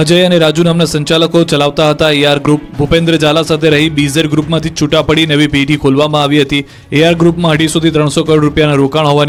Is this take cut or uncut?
uncut